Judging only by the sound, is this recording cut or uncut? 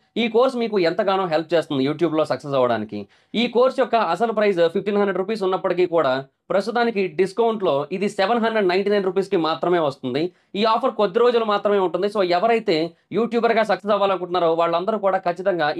uncut